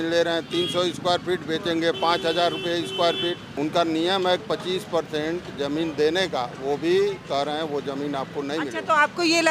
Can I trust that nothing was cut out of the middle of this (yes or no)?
no